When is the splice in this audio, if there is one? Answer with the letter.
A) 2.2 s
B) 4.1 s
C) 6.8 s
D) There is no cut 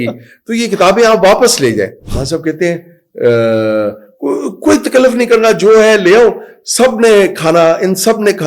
A